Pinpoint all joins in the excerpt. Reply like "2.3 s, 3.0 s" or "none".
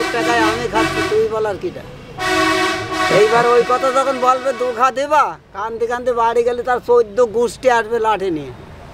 none

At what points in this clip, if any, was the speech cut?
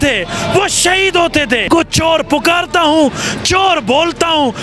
1.7 s

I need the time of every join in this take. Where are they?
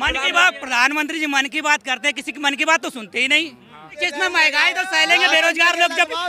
4.0 s

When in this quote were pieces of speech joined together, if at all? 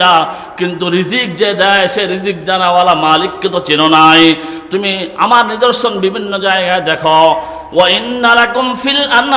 none

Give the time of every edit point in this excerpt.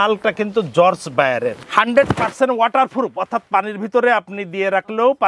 1.6 s

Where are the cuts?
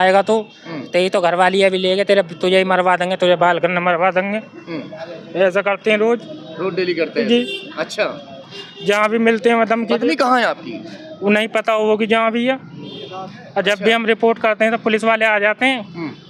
none

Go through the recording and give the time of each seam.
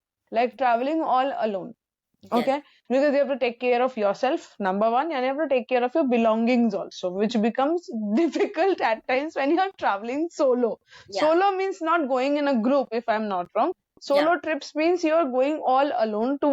none

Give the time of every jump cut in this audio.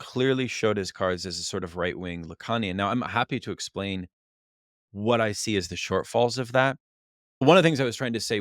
7.4 s

